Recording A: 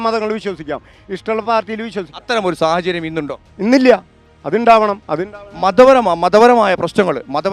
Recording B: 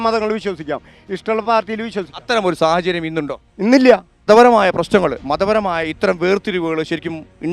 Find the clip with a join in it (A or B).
B